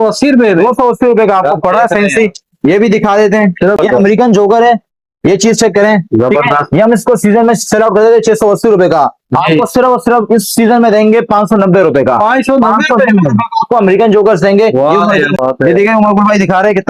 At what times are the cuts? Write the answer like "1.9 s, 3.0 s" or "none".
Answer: 3.8 s, 15.3 s